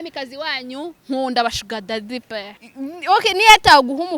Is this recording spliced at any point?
yes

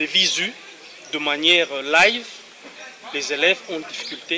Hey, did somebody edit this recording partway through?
no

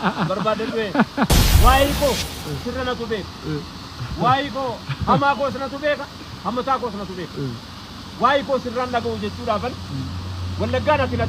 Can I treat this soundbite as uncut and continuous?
no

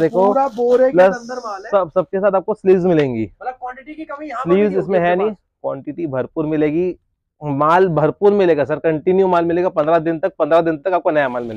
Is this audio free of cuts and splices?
yes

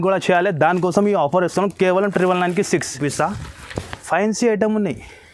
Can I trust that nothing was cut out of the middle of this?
no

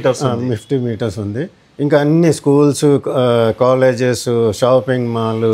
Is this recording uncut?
yes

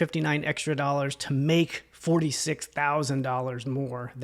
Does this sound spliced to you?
no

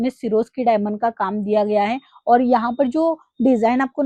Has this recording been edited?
no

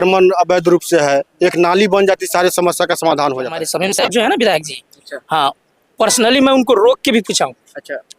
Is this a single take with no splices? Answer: no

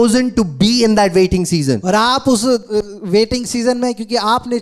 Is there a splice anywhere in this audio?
no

